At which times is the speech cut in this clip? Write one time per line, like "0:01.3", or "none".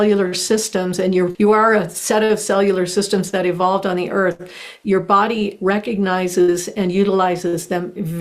0:01.3

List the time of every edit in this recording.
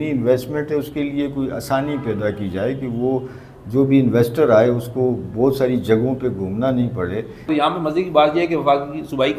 0:07.5

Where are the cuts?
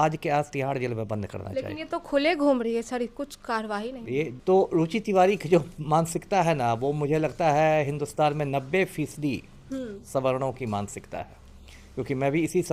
0:04.3

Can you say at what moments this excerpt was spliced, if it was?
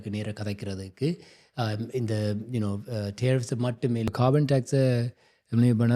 0:04.1

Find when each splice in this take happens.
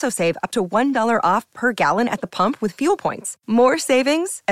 none

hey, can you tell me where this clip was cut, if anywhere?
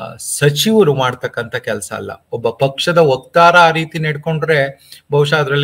none

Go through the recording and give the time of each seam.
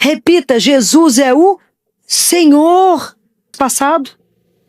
0:03.5

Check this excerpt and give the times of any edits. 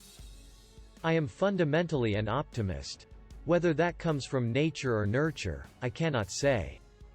0:01.0

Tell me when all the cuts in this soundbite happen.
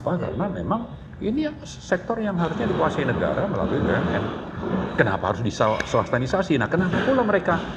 none

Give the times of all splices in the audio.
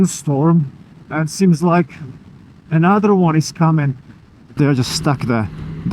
0:04.5

